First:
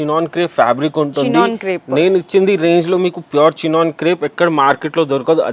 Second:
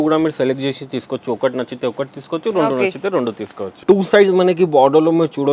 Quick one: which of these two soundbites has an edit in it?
second; 1 cut; at 3.8 s

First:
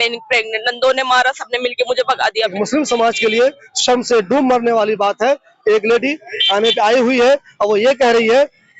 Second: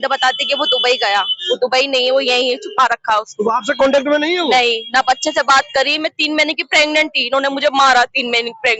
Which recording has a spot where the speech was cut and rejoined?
first; 1 cut; at 2.5 s

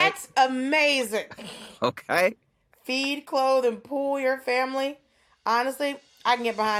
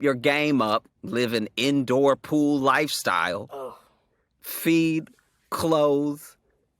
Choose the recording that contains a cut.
second; 1 cut; at 1.0 s

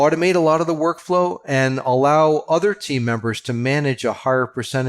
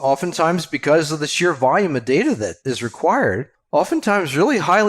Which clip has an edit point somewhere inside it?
second; 2 cuts; at 2.6 s, 3.5 s

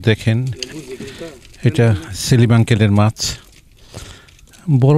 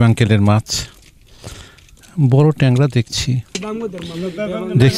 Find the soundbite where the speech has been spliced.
second; 1 cut; at 3.6 s

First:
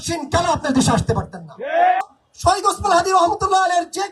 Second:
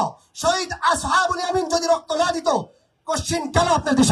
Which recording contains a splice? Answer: first; 1 cut; at 2.0 s

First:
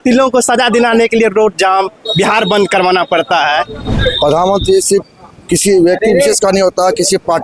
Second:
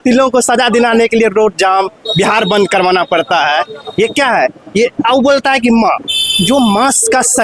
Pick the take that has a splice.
first; 1 cut; at 3.8 s

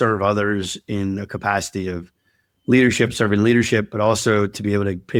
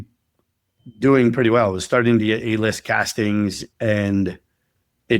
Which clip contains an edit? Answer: second; 1 cut; at 3.6 s

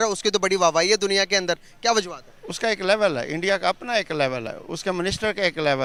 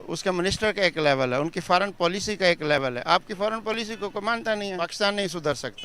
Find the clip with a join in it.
second; 1 cut; at 4.9 s

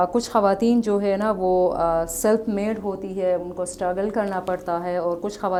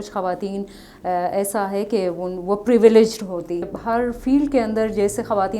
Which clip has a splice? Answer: second; 1 cut; at 3.7 s

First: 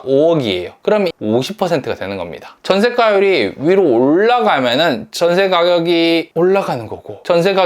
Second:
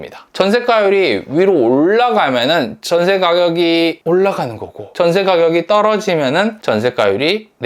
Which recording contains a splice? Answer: first; 1 cut; at 0.9 s

